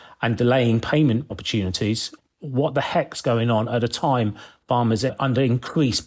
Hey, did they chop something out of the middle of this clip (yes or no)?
yes